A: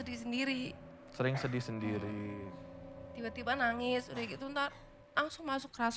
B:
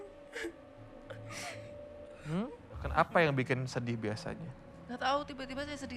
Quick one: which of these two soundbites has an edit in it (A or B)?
B